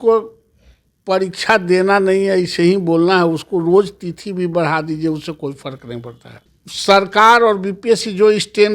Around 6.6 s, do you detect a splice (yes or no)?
yes